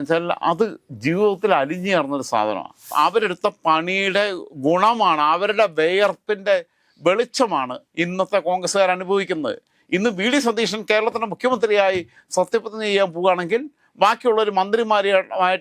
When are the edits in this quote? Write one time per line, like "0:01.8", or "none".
0:02.9